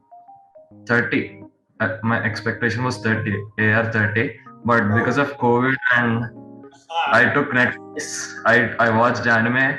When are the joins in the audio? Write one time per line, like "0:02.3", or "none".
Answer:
none

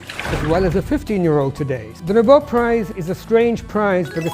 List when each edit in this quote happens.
0:01.9
0:02.9

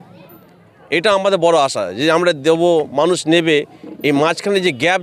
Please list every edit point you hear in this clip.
none

